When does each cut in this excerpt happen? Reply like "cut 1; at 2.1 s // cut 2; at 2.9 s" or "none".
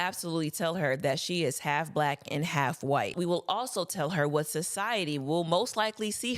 cut 1; at 3.1 s